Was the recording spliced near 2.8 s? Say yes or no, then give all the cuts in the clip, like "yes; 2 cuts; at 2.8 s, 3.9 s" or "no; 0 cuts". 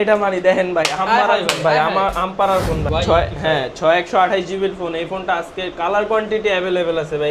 yes; 1 cut; at 2.8 s